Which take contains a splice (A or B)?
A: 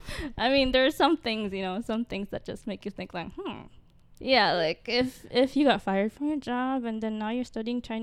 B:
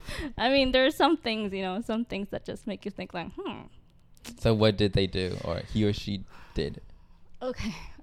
A